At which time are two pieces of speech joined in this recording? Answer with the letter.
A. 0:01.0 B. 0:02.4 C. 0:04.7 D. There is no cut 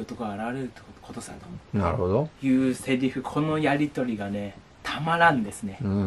D